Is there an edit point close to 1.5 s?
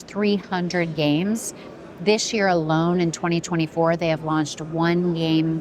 no; 0 cuts

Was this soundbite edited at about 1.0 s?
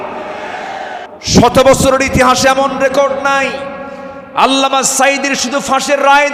yes; 1 cut; at 1.0 s

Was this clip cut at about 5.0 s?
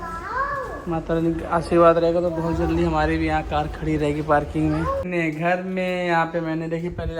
yes; 1 cut; at 5.0 s

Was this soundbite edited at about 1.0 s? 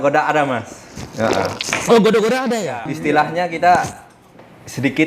no; 1 cut; at 2.9 s

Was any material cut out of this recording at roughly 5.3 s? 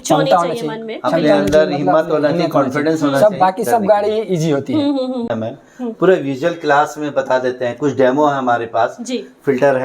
yes; 1 cut; at 5.3 s

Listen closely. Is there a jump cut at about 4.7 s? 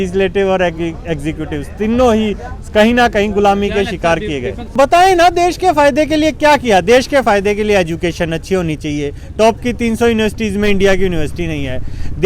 yes; 1 cut; at 4.7 s

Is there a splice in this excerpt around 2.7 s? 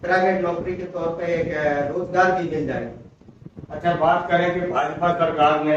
no; 0 cuts

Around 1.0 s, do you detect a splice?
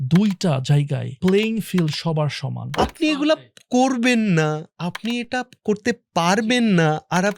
yes; 2 cuts; at 1.0 s, 2.8 s

